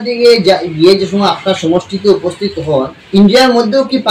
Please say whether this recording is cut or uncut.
cut